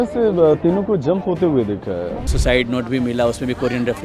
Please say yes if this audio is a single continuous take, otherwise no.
no